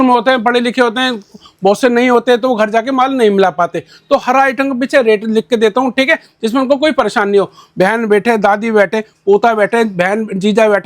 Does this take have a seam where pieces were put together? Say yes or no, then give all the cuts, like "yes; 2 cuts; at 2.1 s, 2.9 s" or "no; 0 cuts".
no; 0 cuts